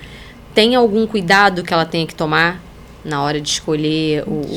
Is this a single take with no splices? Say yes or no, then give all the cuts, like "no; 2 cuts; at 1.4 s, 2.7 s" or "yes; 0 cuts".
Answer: yes; 0 cuts